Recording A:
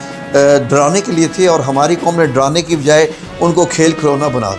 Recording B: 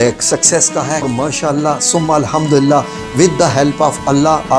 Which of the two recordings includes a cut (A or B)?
B